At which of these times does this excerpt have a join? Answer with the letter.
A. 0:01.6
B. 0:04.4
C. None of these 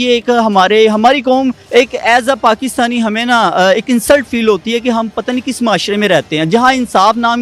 A